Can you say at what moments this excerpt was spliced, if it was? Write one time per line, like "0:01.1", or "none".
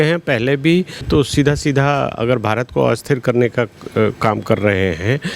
0:01.1